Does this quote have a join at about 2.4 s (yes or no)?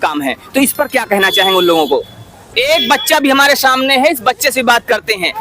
yes